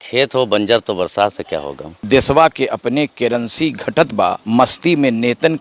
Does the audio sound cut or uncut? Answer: cut